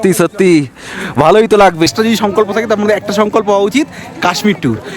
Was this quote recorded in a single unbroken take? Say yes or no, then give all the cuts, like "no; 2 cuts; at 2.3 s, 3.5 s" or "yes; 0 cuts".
no; 1 cut; at 1.9 s